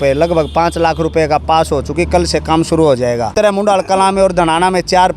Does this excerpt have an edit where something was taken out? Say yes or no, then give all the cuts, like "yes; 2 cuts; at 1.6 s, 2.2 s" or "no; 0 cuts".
yes; 1 cut; at 3.3 s